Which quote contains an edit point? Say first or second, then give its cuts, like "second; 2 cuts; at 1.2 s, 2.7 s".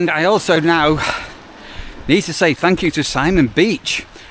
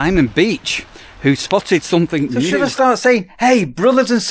second; 1 cut; at 2.4 s